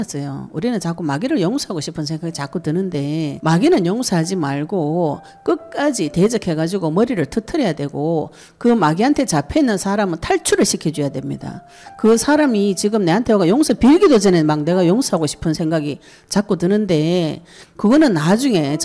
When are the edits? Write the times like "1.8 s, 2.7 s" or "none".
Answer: 3.4 s